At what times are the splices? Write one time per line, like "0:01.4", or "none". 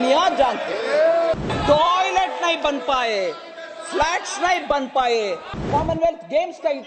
0:01.4
0:05.6